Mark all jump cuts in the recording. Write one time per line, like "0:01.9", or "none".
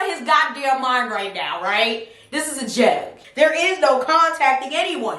0:03.1